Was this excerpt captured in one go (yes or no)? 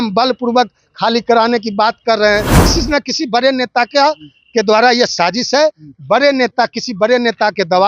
no